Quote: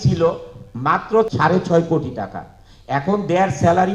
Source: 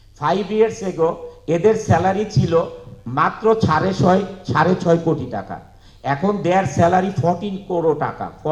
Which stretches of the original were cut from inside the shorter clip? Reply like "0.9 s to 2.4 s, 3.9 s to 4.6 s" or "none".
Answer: 3.6 s to 4.4 s